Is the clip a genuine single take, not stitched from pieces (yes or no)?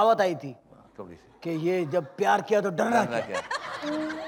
yes